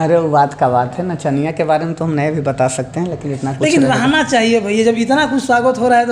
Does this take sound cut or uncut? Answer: uncut